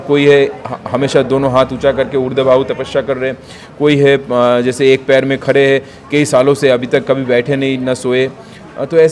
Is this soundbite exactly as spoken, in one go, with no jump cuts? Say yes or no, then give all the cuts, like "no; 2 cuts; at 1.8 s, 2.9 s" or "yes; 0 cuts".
yes; 0 cuts